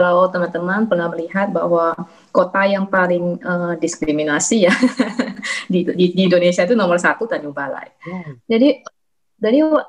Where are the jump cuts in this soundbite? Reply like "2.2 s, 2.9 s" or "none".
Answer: none